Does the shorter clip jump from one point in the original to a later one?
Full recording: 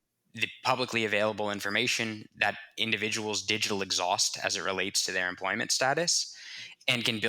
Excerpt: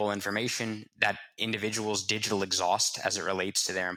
no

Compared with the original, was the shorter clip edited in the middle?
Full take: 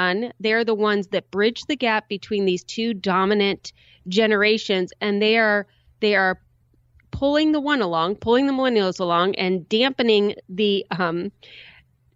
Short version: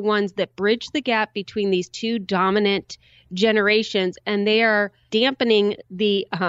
yes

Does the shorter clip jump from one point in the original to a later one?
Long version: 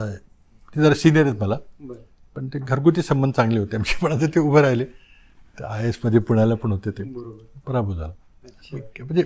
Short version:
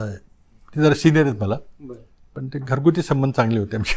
no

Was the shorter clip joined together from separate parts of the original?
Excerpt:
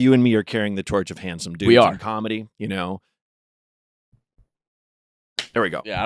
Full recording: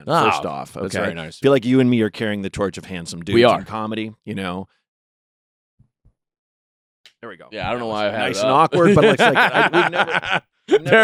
no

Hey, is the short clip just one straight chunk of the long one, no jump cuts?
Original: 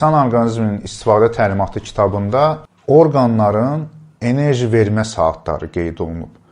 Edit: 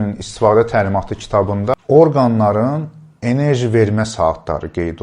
no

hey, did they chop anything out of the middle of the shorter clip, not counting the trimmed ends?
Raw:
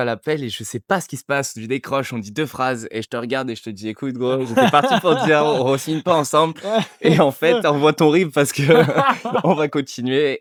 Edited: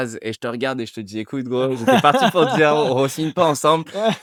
no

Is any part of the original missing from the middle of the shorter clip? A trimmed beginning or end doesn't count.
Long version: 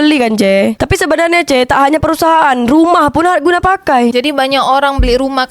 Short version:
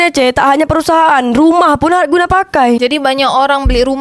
no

